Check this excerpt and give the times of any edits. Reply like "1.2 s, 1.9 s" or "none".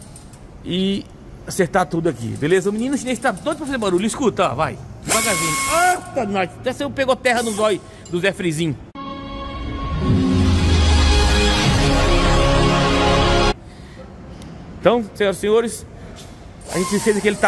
8.9 s, 13.6 s